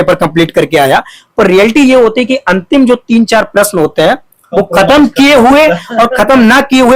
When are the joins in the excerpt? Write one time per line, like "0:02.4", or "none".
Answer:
none